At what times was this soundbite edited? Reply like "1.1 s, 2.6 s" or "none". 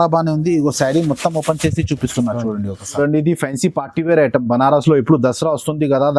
3.0 s